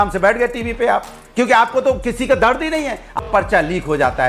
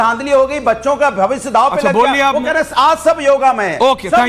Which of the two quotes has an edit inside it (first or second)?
first